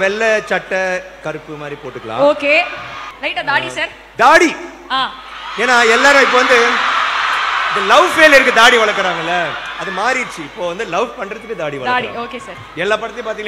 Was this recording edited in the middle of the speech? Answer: no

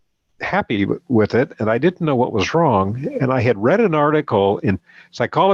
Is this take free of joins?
yes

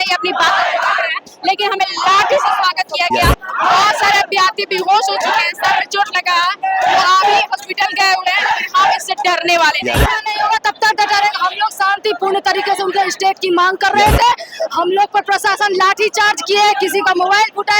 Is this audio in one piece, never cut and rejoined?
no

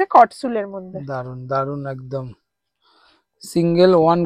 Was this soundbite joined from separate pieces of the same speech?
no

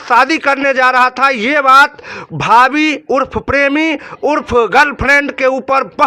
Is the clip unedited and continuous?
yes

